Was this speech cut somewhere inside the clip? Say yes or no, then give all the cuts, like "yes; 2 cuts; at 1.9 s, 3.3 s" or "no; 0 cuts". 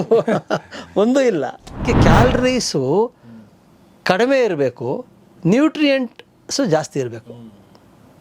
yes; 1 cut; at 1.8 s